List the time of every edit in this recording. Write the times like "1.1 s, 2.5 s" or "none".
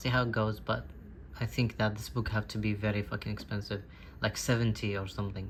none